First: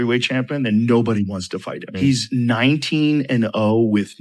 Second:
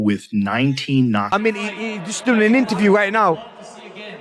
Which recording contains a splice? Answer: second; 1 cut; at 1.3 s

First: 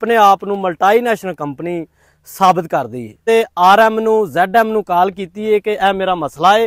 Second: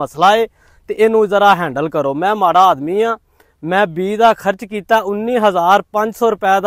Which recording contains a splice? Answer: first; 1 cut; at 3.2 s

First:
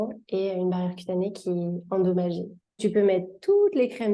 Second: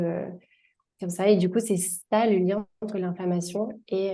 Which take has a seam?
first; 1 cut; at 2.8 s

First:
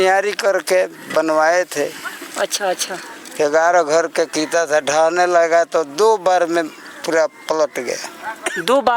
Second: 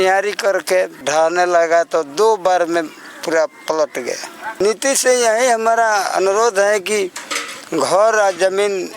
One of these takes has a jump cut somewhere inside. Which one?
second; 2 cuts; at 1.1 s, 4.6 s

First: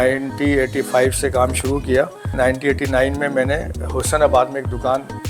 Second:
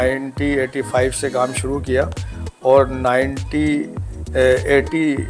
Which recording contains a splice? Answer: first; 1 cut; at 2.3 s

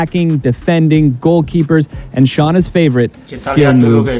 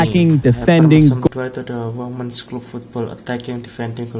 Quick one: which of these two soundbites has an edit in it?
first; 1 cut; at 1.3 s

